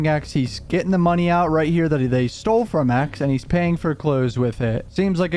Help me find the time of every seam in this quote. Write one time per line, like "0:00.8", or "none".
none